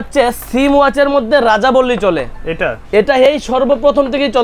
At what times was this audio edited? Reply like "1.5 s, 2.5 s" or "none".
none